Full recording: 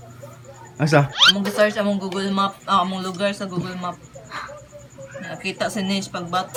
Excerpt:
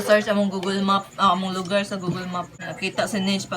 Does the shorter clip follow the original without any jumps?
no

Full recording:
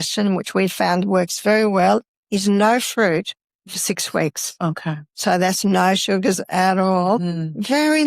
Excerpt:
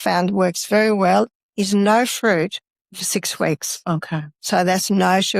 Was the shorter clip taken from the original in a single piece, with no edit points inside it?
yes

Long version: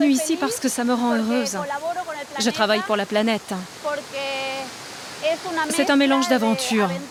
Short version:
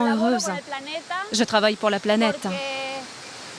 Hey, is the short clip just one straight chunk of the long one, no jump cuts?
no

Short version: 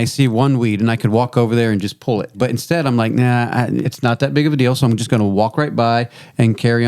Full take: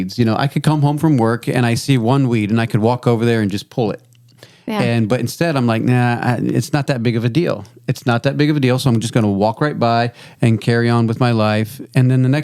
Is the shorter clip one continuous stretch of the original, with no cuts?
no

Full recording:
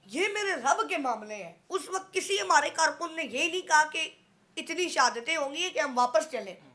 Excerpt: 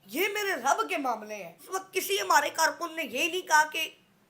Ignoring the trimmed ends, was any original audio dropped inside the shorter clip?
yes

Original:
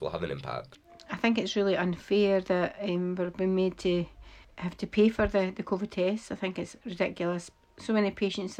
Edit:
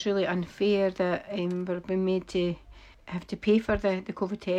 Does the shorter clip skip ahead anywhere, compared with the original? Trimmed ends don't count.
no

